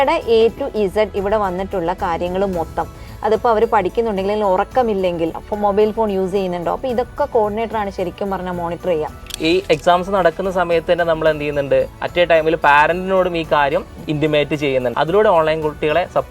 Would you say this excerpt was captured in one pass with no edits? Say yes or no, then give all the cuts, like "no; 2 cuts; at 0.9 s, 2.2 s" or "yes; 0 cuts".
no; 3 cuts; at 5.5 s, 9.3 s, 14.9 s